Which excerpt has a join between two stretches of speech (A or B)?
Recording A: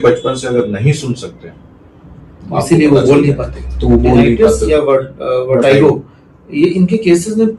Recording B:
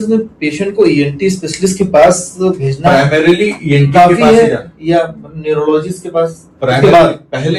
A